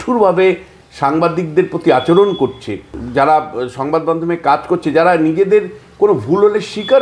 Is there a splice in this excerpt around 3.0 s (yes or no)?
yes